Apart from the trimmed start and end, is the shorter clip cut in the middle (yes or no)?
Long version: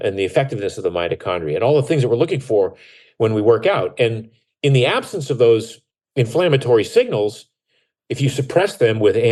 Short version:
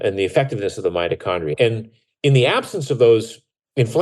yes